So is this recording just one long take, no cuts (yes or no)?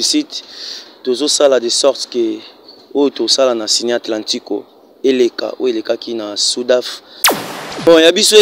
no